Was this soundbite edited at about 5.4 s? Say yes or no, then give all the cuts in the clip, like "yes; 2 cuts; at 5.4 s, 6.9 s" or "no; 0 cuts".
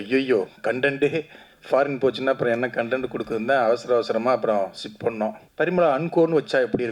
yes; 1 cut; at 5.4 s